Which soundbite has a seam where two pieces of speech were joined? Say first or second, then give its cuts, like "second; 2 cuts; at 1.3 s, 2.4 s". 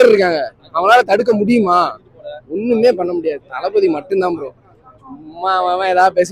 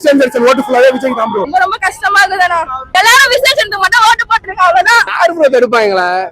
second; 3 cuts; at 1.5 s, 3.0 s, 5.1 s